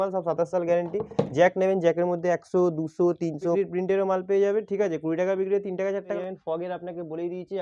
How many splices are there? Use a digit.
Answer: 2